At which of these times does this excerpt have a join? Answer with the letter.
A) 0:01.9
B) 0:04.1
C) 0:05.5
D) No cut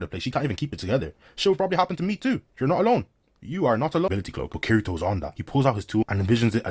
B